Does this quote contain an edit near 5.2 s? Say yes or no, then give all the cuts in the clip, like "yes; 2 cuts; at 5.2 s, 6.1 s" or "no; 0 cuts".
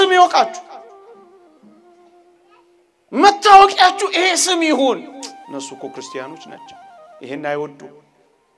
no; 2 cuts; at 0.8 s, 3.0 s